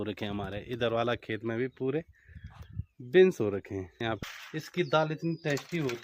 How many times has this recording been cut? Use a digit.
1